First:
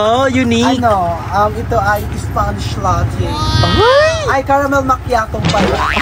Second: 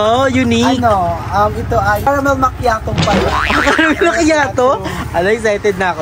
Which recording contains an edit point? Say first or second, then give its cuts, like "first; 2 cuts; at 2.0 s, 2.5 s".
second; 1 cut; at 2.1 s